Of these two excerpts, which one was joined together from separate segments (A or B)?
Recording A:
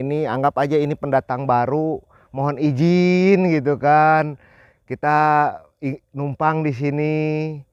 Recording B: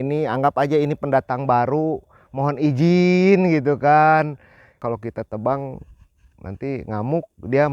B